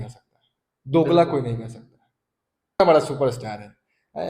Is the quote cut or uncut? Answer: cut